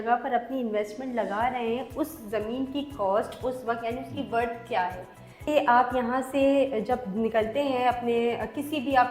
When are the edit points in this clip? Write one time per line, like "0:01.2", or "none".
0:05.4

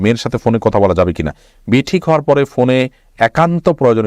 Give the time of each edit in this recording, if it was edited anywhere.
none

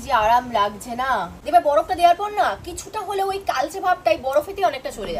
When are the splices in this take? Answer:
0:01.3

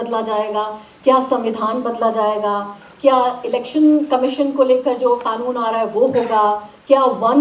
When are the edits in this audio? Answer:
none

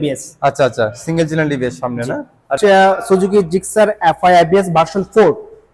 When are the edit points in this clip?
0:02.5

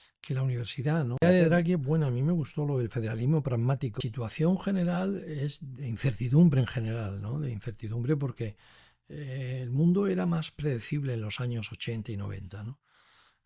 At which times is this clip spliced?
0:01.2
0:04.1

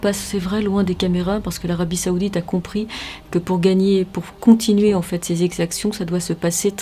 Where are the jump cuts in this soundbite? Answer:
none

